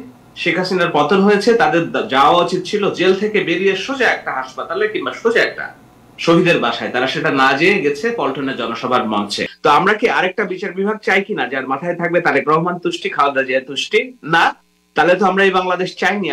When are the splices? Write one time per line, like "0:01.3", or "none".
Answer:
0:09.4